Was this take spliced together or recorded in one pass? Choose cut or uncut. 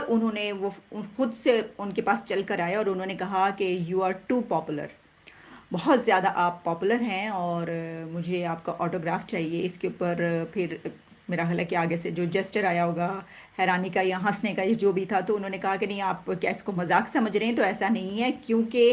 uncut